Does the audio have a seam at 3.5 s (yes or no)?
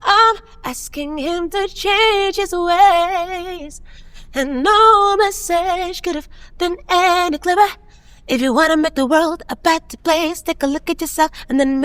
no